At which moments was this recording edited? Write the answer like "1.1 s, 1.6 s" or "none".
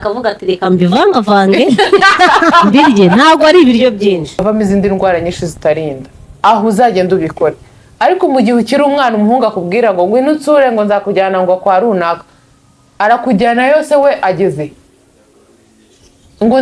4.4 s

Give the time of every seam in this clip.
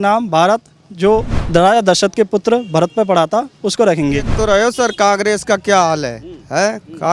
1.4 s, 4.3 s

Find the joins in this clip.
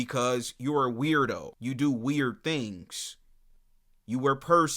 1.5 s

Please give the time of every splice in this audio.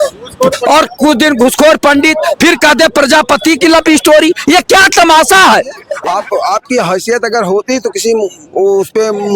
5.8 s

